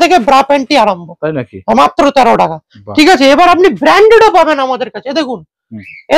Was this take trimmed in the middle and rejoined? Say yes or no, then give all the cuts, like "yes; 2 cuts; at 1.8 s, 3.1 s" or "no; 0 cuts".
no; 0 cuts